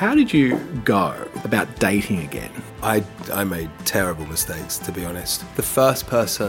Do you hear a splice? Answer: yes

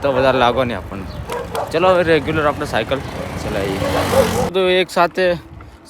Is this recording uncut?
no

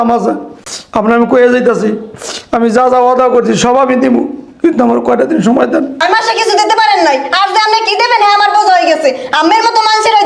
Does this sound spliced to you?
no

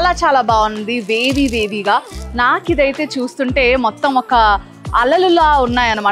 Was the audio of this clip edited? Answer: no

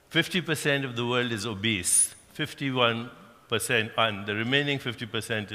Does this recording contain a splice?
yes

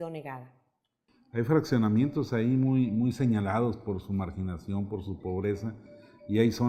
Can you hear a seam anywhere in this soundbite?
no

